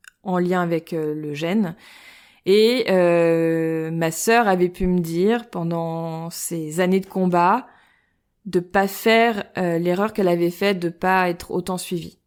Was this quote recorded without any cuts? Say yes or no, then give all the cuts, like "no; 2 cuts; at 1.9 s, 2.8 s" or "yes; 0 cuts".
yes; 0 cuts